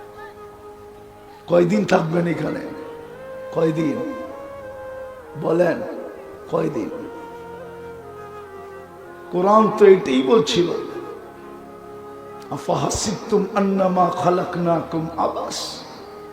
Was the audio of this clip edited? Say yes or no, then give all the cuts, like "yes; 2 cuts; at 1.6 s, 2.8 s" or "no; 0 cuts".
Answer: yes; 2 cuts; at 11.0 s, 12.5 s